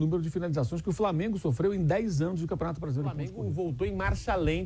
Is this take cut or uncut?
cut